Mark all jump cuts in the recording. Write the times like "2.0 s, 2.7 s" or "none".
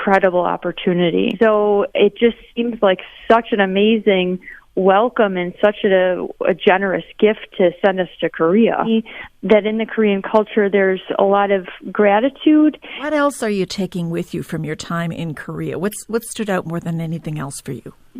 1.3 s, 8.9 s, 13.1 s